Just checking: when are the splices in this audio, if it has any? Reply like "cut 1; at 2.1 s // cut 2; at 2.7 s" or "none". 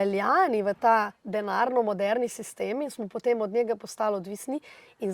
cut 1; at 1.2 s